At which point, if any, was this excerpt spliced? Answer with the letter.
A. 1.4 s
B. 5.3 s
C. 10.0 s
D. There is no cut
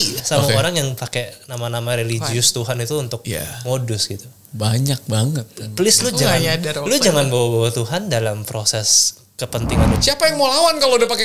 C